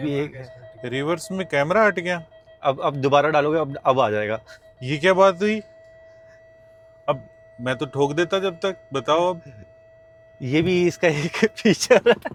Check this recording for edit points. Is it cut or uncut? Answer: uncut